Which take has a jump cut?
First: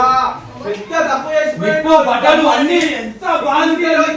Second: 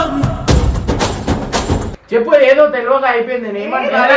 second; 1 cut; at 2.0 s

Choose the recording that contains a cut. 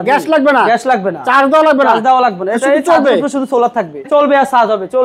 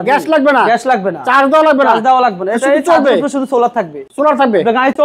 first; 1 cut; at 4.1 s

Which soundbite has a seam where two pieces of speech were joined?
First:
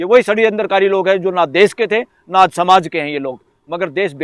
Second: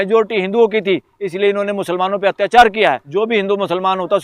second; 1 cut; at 3.0 s

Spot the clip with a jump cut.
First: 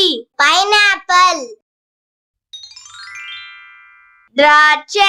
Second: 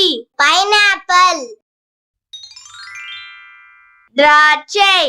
second; 2 cuts; at 2.4 s, 3.9 s

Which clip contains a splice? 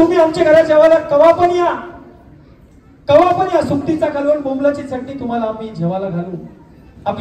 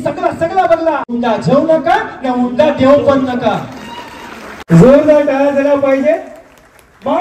second; 2 cuts; at 1.1 s, 4.5 s

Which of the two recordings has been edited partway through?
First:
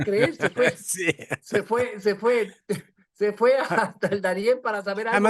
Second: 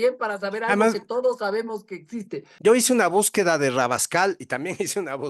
second; 1 cut; at 2.4 s

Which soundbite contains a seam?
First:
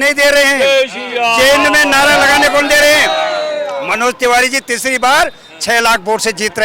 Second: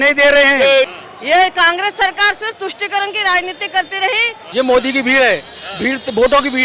second; 2 cuts; at 1.0 s, 4.4 s

